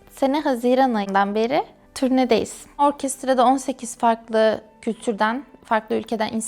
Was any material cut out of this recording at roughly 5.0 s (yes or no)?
no